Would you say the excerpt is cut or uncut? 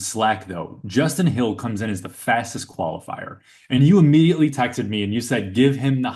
uncut